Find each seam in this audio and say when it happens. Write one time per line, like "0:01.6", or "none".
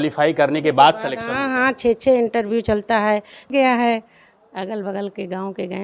0:03.5